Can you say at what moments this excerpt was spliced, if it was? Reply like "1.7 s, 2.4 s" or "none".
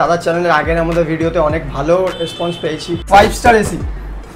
3.0 s